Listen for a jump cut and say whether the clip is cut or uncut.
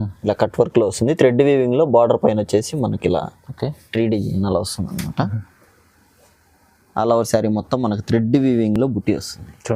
uncut